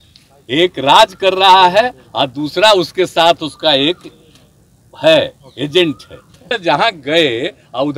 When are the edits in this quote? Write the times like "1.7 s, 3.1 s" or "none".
6.5 s